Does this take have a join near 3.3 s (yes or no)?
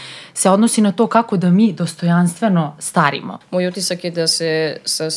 yes